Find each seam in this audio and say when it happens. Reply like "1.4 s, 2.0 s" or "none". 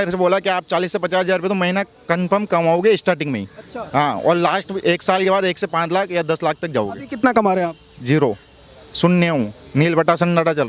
none